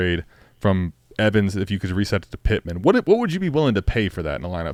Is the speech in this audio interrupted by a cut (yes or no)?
no